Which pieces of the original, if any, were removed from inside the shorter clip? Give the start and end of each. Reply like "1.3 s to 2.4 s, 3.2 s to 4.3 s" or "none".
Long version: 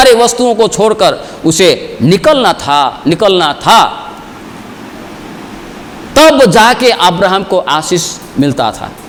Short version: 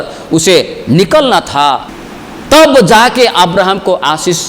3.0 s to 5.5 s